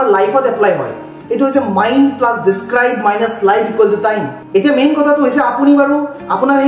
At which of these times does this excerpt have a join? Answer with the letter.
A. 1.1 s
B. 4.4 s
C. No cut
B